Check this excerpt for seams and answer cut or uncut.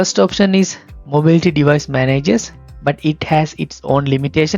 cut